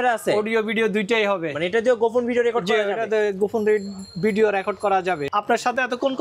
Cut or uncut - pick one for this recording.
cut